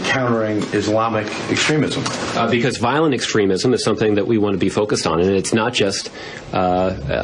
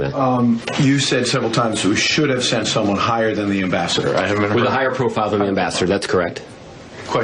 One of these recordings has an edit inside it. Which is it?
first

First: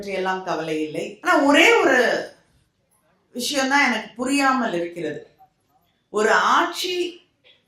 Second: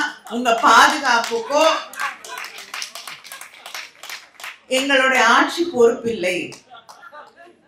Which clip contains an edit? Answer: first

